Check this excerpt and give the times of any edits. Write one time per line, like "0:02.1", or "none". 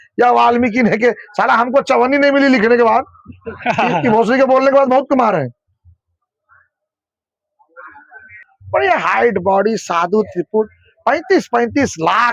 0:08.5